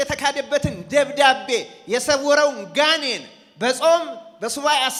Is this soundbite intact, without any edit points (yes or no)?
yes